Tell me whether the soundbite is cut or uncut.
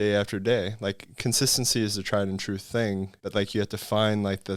uncut